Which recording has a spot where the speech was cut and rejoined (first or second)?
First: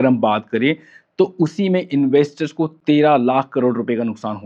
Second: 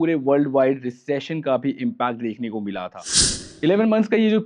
second